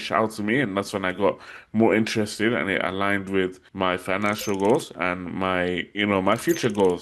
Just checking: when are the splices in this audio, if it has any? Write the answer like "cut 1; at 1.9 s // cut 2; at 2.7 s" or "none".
cut 1; at 3.6 s